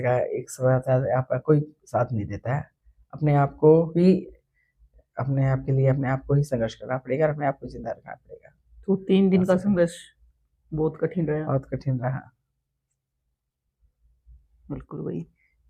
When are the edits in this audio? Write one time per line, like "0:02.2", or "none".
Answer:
none